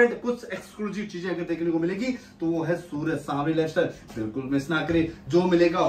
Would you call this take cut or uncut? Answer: uncut